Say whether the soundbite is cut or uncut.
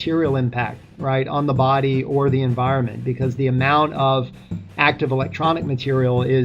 uncut